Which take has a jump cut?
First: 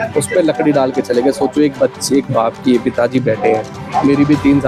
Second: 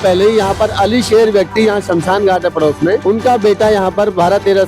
second; 1 cut; at 3.0 s

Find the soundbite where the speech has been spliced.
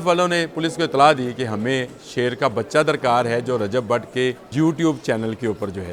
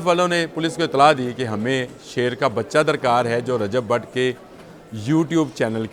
first; 1 cut; at 4.4 s

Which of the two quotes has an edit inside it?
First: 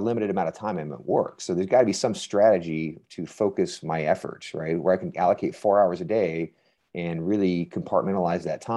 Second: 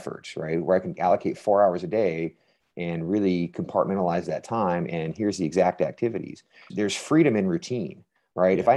second; 1 cut; at 6.7 s

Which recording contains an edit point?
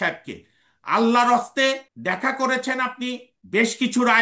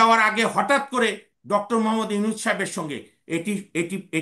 first; 2 cuts; at 1.9 s, 3.3 s

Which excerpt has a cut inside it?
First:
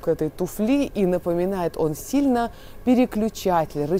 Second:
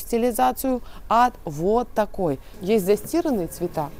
second; 1 cut; at 2.5 s

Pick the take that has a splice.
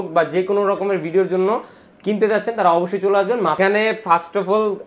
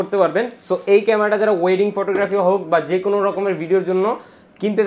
first; 1 cut; at 3.6 s

